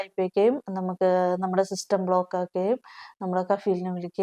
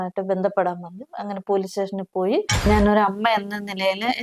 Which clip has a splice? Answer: second; 1 cut; at 2.7 s

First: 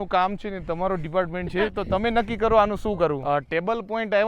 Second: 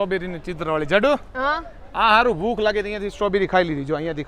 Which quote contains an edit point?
first; 1 cut; at 3.2 s

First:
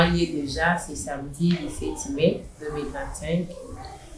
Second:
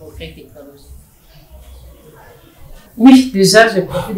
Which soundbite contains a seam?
second; 1 cut; at 2.8 s

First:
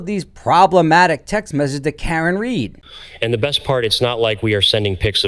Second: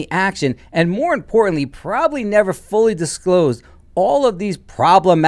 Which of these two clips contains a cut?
first; 1 cut; at 2.8 s

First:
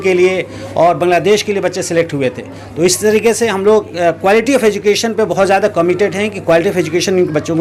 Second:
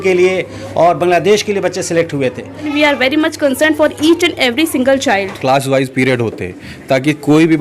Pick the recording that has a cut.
second; 2 cuts; at 2.7 s, 5.3 s

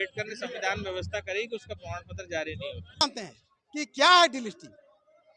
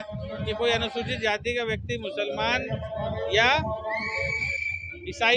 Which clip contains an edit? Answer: first; 1 cut; at 3.0 s

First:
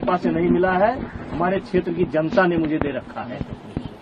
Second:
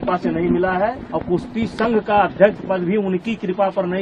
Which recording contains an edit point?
second; 1 cut; at 1.1 s

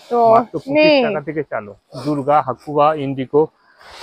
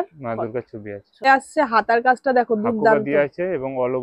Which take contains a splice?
second; 1 cut; at 1.3 s

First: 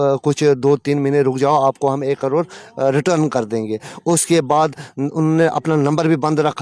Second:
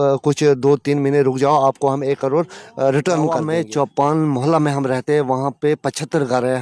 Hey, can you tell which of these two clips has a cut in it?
second; 1 cut; at 3.4 s

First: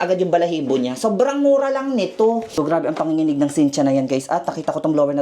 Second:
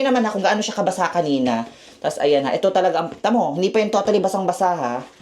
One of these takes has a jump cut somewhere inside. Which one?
first; 1 cut; at 2.5 s

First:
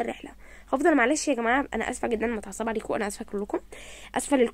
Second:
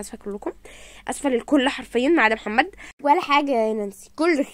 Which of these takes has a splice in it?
second; 1 cut; at 2.8 s

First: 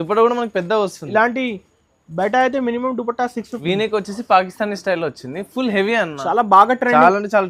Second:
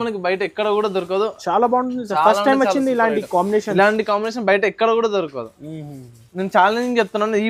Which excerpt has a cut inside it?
first; 1 cut; at 3.5 s

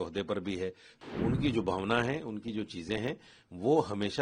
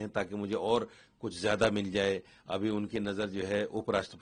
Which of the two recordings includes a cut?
first; 1 cut; at 0.9 s

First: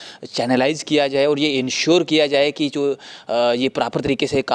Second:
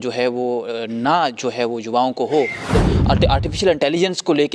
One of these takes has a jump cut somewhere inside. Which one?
second; 1 cut; at 2.7 s

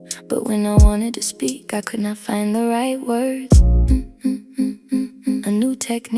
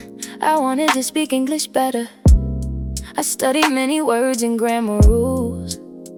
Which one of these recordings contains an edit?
first; 1 cut; at 4.7 s

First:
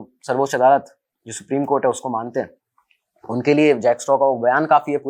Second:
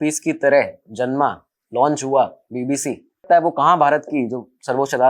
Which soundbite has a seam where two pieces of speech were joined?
second; 1 cut; at 3.2 s

